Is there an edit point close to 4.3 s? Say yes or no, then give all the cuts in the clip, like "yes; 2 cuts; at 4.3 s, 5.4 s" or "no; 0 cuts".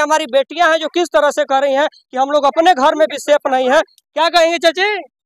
no; 0 cuts